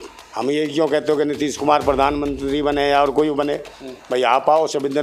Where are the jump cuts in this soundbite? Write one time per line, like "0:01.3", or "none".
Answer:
none

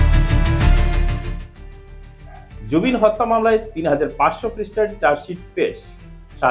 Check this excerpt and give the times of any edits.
0:01.1

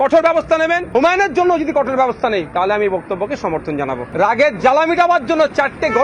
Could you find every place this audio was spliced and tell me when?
0:00.8
0:04.0

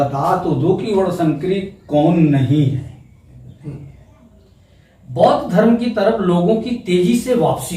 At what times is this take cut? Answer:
0:03.5

